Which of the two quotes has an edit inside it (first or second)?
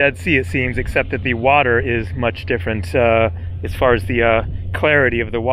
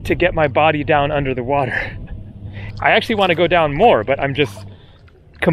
second